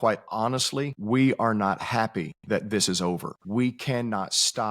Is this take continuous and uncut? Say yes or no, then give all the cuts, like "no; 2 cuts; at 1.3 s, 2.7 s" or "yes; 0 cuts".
no; 3 cuts; at 1.0 s, 2.3 s, 3.3 s